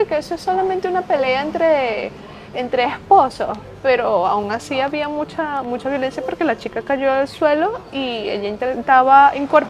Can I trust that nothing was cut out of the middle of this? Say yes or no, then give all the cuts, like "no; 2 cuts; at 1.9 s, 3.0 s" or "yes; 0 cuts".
yes; 0 cuts